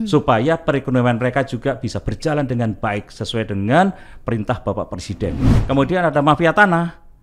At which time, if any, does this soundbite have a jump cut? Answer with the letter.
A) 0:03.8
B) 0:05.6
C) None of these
B